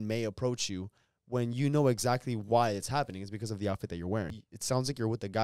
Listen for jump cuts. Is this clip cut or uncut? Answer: cut